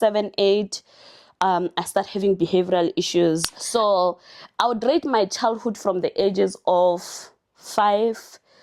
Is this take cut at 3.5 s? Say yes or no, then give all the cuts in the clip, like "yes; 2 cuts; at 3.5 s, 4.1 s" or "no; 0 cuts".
yes; 1 cut; at 3.5 s